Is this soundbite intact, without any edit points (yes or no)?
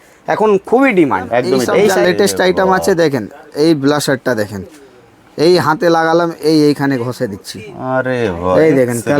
no